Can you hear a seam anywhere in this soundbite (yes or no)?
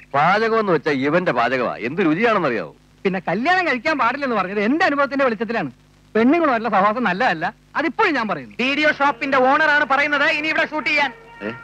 yes